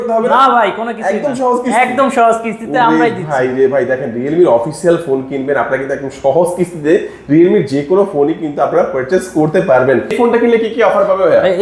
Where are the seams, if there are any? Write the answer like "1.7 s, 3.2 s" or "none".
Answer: 10.1 s